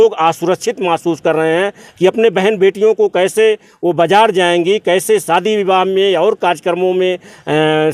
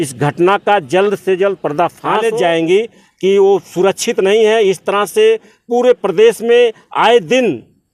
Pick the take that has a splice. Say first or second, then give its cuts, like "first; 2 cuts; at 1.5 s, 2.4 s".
second; 1 cut; at 2.2 s